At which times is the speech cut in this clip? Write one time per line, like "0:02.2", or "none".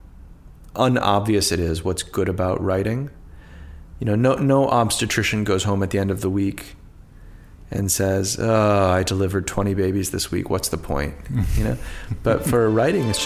none